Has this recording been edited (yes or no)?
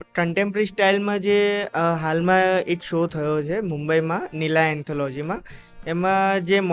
no